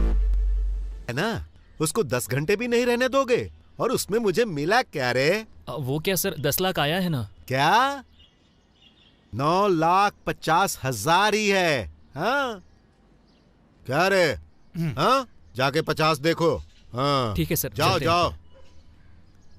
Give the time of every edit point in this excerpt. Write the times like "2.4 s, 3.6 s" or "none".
1.1 s